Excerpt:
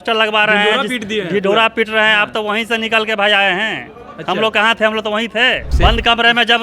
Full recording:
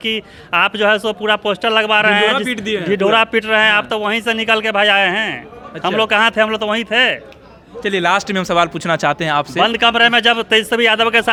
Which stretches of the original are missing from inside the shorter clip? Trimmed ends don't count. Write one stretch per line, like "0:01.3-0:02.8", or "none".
0:07.3-0:09.5

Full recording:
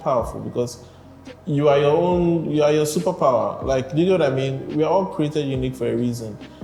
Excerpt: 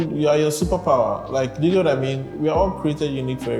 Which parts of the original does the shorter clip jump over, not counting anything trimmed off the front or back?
none

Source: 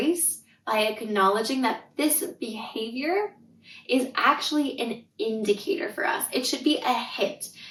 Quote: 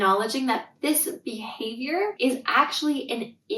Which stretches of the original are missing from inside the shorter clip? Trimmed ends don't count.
0:03.3-0:03.8

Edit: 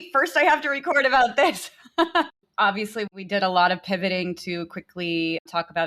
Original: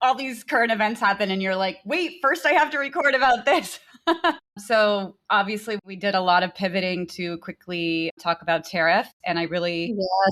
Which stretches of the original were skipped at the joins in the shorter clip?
0:04.5-0:05.1

